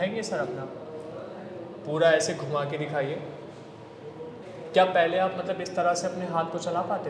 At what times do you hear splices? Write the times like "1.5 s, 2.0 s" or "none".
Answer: 4.4 s